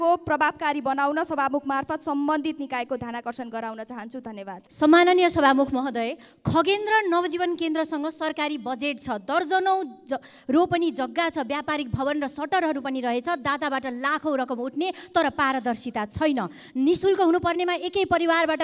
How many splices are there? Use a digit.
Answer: 1